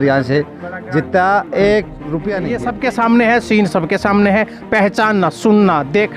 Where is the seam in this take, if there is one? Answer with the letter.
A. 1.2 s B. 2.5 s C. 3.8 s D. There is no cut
B